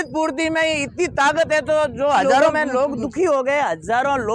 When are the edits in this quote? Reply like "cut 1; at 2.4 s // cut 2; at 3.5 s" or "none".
cut 1; at 2.5 s